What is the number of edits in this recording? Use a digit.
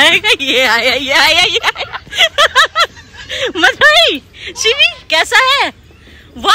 0